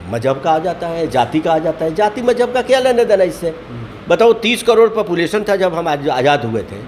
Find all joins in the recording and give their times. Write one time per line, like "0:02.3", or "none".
none